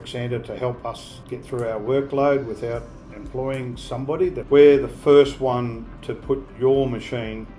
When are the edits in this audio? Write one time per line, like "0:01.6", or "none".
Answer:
0:04.4